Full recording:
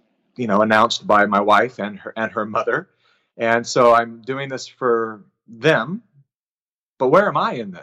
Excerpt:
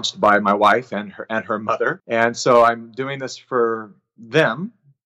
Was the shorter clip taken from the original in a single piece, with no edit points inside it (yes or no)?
no